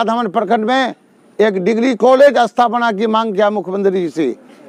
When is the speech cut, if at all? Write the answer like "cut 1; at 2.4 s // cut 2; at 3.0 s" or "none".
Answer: none